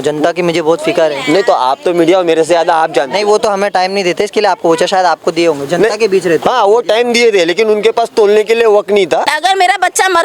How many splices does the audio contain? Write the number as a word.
one